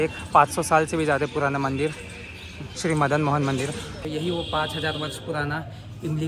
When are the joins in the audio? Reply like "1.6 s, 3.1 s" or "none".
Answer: 4.1 s